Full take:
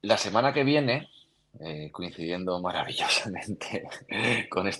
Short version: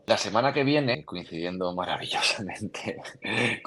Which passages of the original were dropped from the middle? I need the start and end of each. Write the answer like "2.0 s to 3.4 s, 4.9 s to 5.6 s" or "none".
1.0 s to 1.9 s

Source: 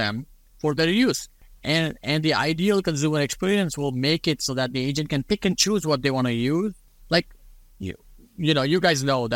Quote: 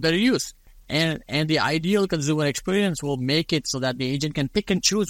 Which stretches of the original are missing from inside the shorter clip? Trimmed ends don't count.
none

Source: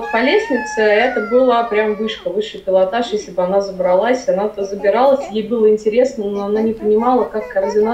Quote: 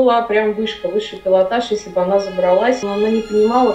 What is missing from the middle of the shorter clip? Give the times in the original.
4.2 s to 6.3 s

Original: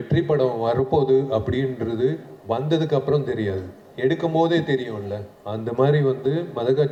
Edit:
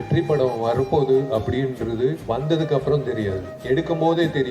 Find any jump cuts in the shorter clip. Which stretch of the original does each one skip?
2.2 s to 2.4 s, 3.7 s to 3.8 s

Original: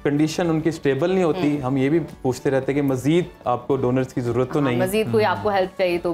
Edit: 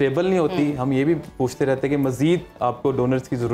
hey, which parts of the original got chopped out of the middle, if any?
none

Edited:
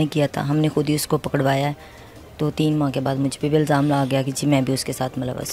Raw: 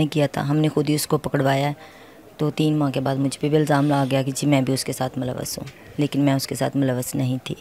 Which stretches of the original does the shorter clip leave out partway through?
none

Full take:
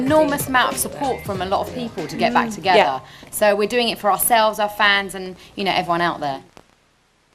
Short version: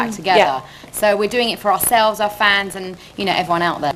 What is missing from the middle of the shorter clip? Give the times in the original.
none

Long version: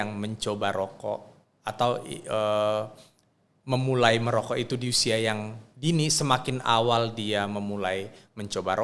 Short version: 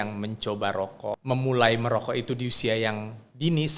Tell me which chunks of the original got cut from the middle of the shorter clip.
1.2 s to 3.6 s

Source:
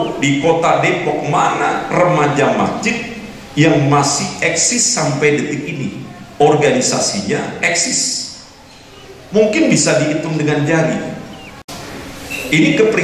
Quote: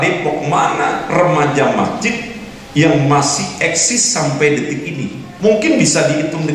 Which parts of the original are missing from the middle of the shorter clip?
6.1 s to 9.2 s

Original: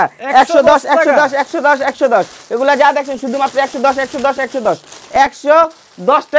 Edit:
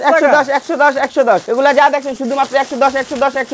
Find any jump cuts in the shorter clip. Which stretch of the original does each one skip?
2.3 s to 2.5 s

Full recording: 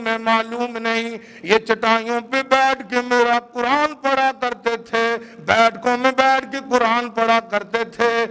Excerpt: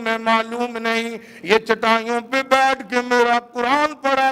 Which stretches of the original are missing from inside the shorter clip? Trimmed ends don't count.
none

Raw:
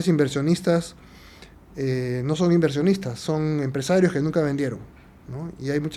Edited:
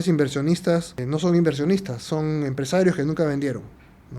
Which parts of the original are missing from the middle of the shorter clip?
1.0 s to 2.1 s

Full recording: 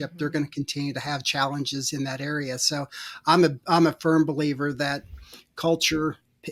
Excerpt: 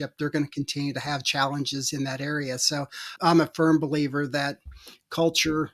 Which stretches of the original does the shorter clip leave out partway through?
3.1 s to 3.6 s

